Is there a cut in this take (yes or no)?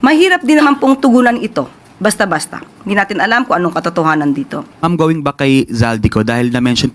yes